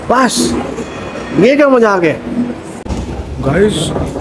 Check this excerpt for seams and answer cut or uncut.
cut